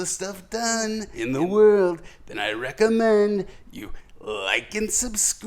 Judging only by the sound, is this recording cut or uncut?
cut